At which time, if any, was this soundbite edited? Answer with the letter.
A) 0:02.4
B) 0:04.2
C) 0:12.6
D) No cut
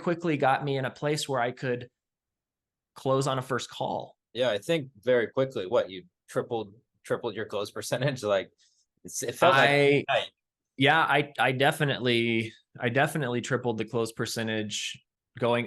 B